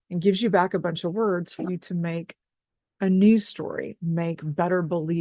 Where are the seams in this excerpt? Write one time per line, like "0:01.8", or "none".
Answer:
none